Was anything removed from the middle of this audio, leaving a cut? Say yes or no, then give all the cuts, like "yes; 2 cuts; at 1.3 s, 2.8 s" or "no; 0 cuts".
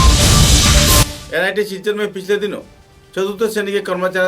no; 0 cuts